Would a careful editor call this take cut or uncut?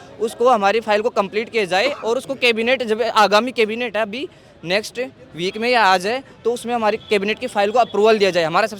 uncut